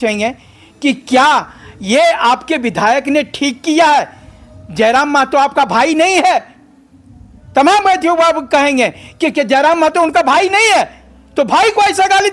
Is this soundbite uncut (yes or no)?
yes